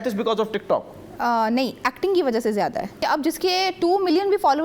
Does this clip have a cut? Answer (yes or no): yes